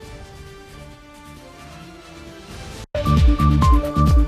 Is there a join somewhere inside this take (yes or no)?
yes